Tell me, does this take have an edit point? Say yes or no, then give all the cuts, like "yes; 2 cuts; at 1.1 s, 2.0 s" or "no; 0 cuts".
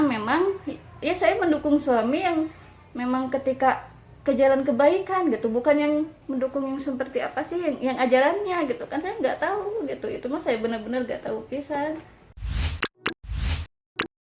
yes; 1 cut; at 12.3 s